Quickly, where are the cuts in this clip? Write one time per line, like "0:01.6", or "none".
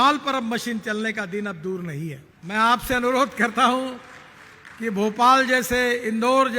0:02.3